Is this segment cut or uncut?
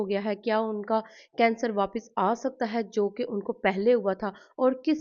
uncut